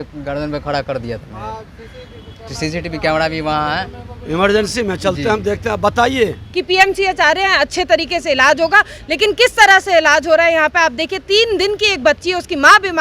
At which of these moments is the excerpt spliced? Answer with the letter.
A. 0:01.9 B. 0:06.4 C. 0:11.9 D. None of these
B